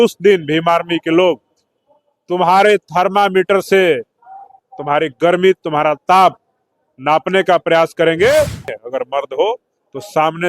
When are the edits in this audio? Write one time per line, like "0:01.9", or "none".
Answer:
0:08.7